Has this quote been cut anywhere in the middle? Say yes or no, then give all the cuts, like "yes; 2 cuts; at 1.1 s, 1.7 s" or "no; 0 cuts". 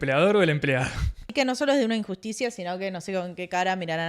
yes; 1 cut; at 1.3 s